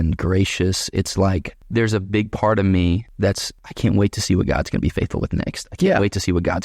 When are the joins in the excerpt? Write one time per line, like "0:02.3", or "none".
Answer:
0:01.5
0:03.2